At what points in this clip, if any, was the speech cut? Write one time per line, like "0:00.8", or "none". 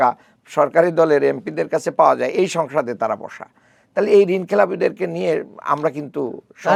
none